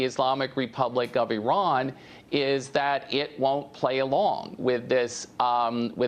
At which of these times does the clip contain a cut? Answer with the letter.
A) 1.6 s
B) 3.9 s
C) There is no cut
B